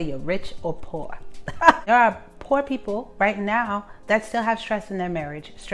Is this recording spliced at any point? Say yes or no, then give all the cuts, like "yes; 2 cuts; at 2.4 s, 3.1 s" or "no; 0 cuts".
yes; 1 cut; at 1.8 s